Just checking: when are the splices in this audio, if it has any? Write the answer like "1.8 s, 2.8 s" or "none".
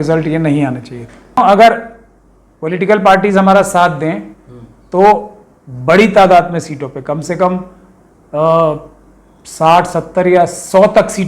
1.4 s